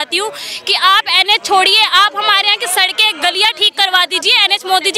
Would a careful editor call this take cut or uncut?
uncut